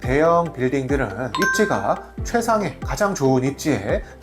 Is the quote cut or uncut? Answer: cut